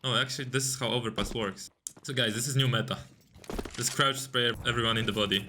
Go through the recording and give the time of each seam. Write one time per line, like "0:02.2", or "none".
0:01.6
0:04.6